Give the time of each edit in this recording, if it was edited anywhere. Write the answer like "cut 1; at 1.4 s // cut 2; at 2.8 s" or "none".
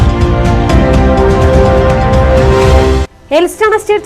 cut 1; at 3.1 s